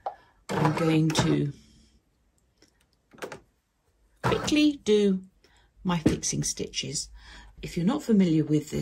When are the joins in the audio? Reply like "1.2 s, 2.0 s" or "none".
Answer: 7.6 s